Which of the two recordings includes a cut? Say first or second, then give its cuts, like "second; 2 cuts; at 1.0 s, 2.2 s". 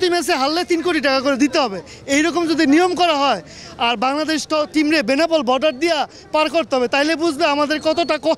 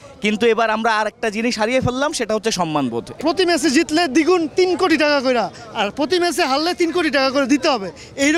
second; 1 cut; at 3.2 s